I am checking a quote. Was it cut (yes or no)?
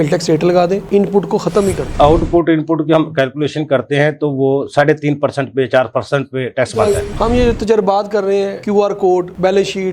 yes